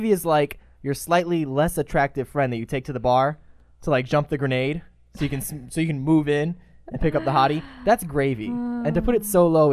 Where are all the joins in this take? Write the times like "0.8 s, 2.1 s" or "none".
none